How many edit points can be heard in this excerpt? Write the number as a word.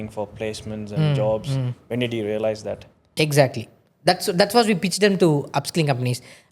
one